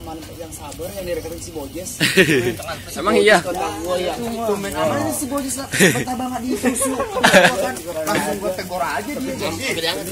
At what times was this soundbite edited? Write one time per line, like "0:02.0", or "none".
none